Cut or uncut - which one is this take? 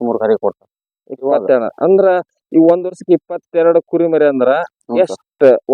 uncut